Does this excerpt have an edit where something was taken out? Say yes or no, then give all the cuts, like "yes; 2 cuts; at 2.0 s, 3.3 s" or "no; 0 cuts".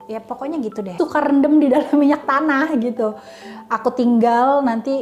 yes; 1 cut; at 1.0 s